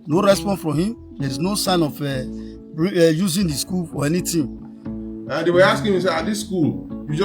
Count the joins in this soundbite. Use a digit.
1